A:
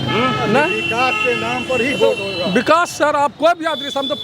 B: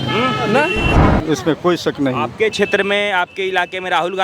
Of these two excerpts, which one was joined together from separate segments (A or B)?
B